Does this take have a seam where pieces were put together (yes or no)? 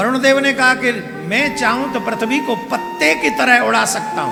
no